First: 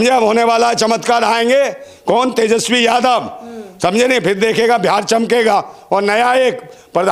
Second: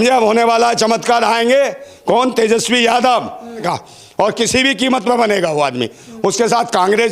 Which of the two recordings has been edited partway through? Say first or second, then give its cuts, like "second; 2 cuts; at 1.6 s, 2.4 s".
second; 1 cut; at 3.6 s